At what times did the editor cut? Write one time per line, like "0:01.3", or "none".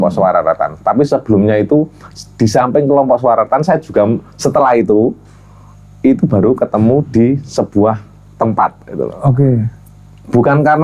none